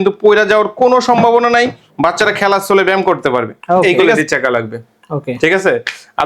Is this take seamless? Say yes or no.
no